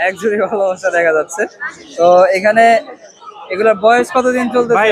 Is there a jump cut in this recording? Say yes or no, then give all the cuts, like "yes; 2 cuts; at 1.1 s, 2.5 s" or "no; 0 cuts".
no; 0 cuts